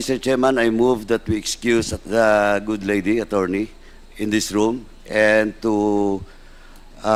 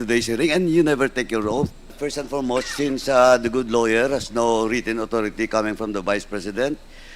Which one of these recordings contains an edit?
second; 1 cut; at 2.0 s

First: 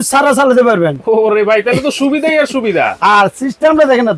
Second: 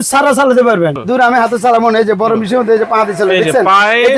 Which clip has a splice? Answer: second; 1 cut; at 1.0 s

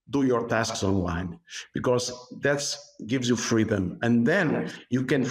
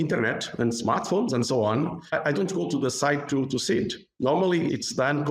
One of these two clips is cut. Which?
second; 1 cut; at 4.0 s

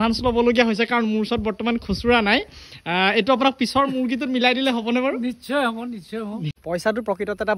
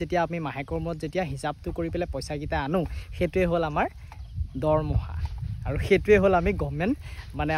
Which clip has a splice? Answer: first; 1 cut; at 6.5 s

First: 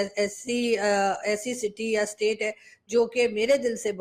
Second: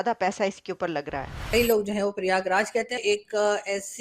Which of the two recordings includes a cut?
second; 2 cuts; at 1.4 s, 3.0 s

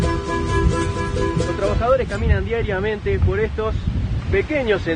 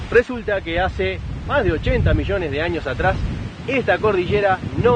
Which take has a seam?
first; 1 cut; at 1.5 s

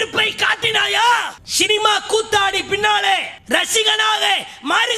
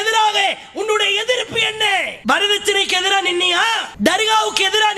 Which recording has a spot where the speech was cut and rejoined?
first; 2 cuts; at 1.4 s, 3.3 s

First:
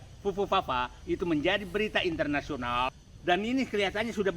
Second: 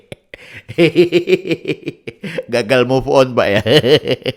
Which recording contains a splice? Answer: first; 1 cut; at 2.9 s

